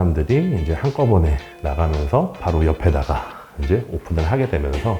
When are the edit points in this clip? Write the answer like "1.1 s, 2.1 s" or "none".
2.4 s